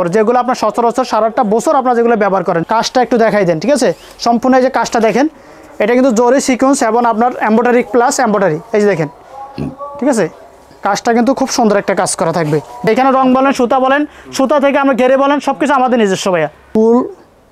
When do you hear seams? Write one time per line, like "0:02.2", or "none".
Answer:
0:02.6
0:12.9
0:16.6